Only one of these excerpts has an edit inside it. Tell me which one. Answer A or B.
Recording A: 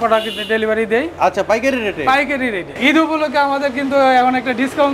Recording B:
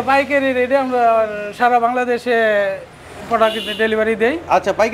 A